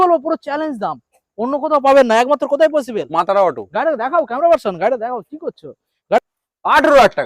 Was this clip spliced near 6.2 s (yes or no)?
yes